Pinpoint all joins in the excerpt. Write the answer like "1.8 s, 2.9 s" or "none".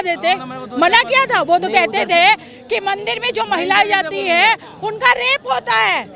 none